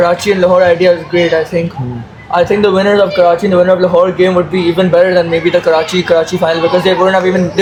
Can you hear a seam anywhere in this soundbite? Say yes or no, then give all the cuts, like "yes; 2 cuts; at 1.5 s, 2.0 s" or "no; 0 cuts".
no; 0 cuts